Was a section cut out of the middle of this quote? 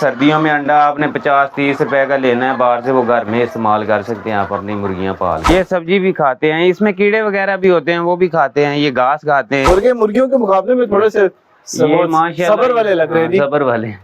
yes; 2 cuts; at 5.5 s, 9.6 s

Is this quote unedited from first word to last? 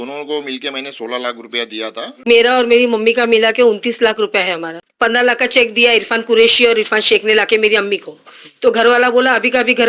no; 2 cuts; at 2.3 s, 4.8 s

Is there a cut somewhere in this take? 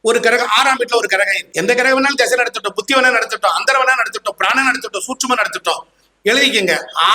yes; 1 cut; at 1.4 s

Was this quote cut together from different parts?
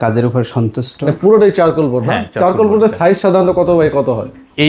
yes; 1 cut; at 1.1 s

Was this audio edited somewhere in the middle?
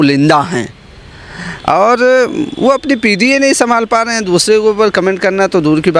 no; 0 cuts

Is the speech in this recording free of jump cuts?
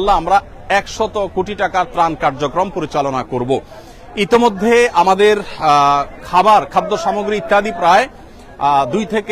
yes; 0 cuts

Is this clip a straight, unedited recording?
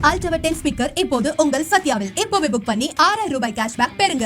yes; 0 cuts

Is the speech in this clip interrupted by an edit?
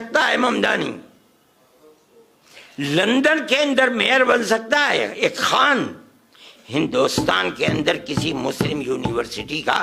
no; 0 cuts

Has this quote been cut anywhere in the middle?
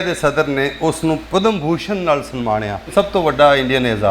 yes; 2 cuts; at 1.2 s, 2.9 s

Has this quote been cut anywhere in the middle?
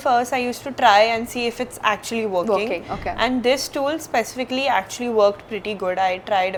no; 0 cuts

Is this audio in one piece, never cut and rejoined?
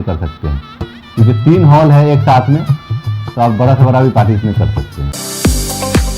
no; 1 cut; at 5.1 s

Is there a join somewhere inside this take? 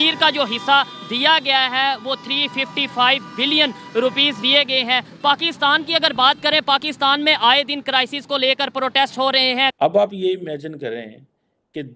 yes; 1 cut; at 9.7 s

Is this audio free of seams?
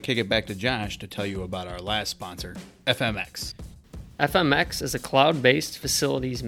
yes; 0 cuts

